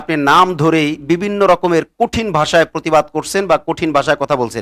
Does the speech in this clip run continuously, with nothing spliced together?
yes; 0 cuts

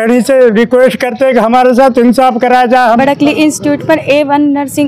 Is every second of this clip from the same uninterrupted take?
no; 1 cut; at 3.0 s

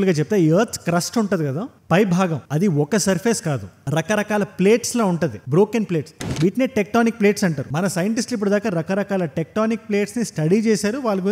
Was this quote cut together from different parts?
yes; 1 cut; at 6.1 s

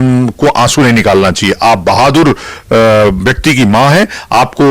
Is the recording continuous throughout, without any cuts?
yes; 0 cuts

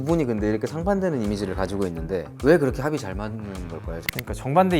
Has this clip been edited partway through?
yes; 2 cuts; at 2.3 s, 4.0 s

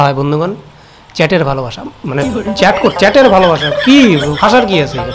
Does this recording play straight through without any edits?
yes; 0 cuts

